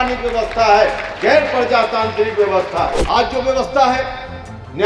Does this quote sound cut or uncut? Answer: cut